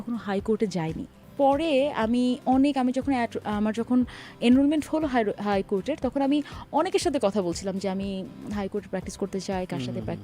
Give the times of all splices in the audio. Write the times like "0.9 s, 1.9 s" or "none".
1.2 s